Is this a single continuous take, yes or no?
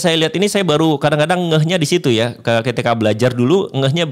yes